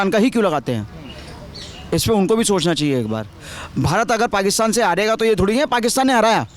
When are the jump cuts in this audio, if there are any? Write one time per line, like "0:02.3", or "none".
none